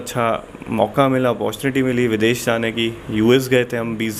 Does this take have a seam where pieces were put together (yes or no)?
no